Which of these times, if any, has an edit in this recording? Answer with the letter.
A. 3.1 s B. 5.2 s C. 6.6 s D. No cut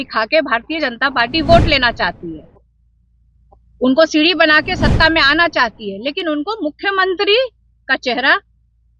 D